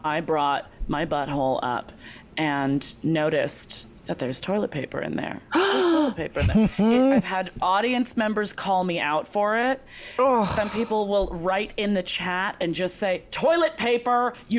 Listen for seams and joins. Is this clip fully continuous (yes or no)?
yes